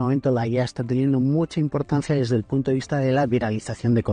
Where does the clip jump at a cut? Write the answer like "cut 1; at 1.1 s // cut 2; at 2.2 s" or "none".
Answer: none